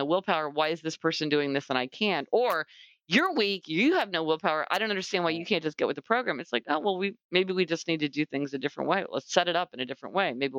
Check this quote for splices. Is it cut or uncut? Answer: uncut